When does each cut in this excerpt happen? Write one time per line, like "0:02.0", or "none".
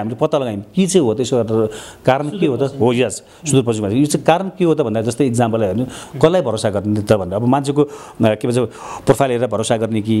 0:06.0

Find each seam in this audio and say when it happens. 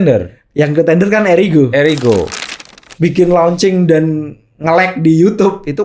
0:02.3

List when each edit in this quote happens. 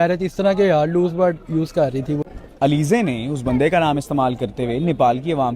0:02.2

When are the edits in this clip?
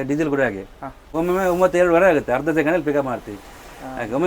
0:01.1

